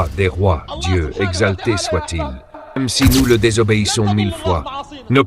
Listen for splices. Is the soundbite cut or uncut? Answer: cut